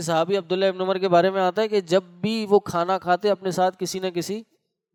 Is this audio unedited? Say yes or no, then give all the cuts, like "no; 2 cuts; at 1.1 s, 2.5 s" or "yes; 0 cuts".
yes; 0 cuts